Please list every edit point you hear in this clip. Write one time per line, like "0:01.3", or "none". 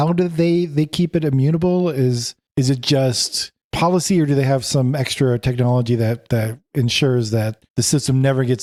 none

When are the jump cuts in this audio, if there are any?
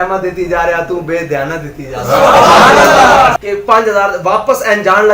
0:03.4

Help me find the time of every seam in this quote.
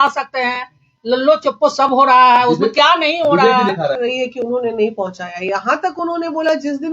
0:04.0

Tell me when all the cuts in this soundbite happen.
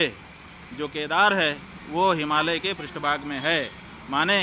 none

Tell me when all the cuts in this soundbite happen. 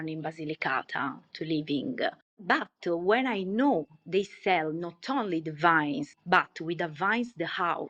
none

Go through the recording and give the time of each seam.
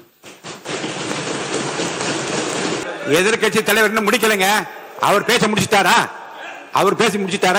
0:02.8

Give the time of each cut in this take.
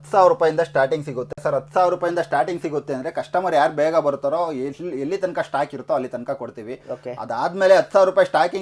none

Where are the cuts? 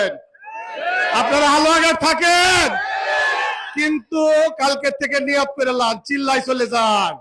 none

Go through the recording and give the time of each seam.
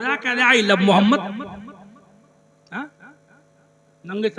none

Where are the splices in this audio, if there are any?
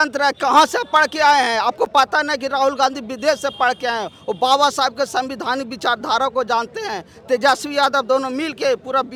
none

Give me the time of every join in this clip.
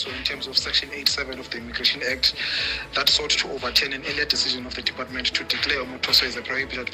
none

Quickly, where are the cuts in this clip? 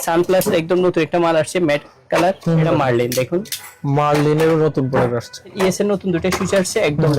0:02.7
0:05.5

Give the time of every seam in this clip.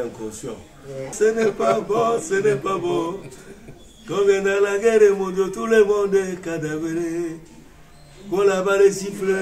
0:01.1

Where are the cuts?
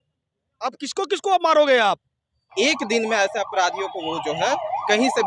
0:02.5

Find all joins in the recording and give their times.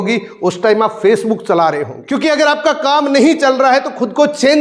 0:02.0

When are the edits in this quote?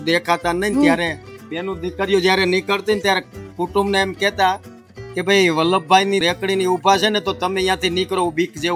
none

